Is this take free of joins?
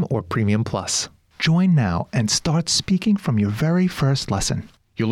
no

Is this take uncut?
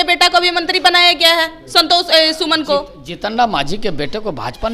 yes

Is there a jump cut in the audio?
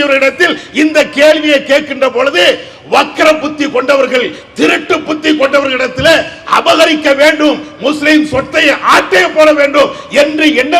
no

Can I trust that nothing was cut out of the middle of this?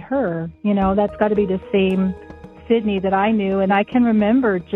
no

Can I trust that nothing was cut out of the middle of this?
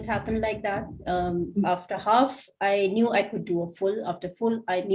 yes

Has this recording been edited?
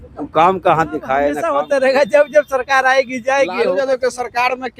yes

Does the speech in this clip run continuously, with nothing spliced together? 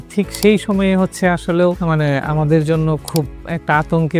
yes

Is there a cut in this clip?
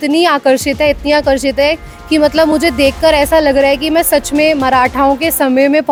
no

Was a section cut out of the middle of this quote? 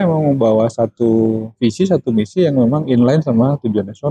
no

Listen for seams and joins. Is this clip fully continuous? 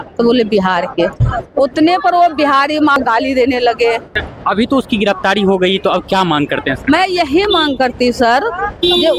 no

